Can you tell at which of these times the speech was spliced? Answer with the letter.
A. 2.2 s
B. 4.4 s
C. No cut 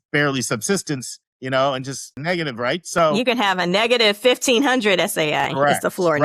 A